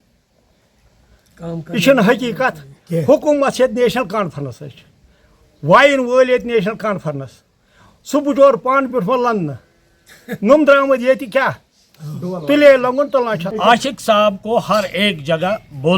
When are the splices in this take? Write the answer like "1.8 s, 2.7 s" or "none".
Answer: 13.5 s